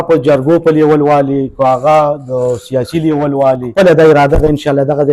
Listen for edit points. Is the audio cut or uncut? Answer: cut